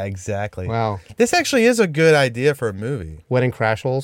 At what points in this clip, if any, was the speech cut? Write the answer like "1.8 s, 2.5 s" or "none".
none